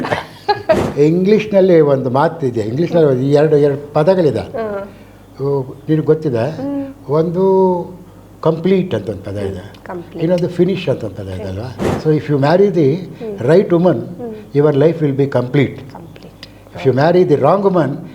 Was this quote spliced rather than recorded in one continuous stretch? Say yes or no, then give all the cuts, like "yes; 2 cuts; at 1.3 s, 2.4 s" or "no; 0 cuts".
yes; 2 cuts; at 0.9 s, 11.8 s